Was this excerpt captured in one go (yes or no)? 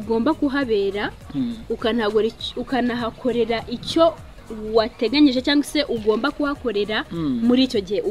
yes